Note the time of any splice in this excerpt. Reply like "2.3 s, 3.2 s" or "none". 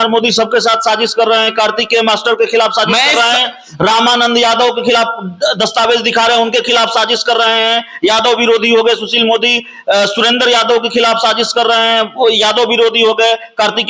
none